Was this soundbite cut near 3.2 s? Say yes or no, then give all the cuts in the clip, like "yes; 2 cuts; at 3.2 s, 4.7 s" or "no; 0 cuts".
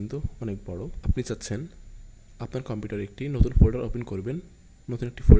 no; 0 cuts